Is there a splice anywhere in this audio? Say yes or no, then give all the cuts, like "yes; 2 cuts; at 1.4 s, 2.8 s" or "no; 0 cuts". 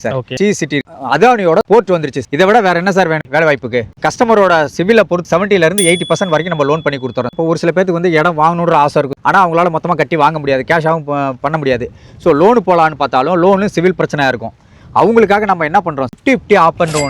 yes; 4 cuts; at 3.9 s, 5.2 s, 7.3 s, 16.1 s